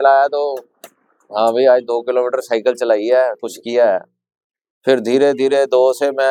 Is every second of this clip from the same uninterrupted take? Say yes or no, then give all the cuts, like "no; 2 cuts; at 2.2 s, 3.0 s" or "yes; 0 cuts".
yes; 0 cuts